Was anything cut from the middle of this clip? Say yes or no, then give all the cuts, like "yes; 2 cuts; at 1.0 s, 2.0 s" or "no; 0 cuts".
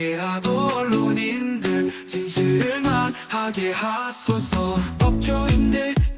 no; 0 cuts